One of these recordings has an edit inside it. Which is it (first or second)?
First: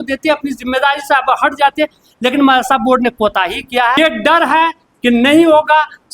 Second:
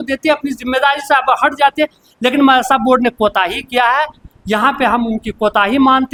first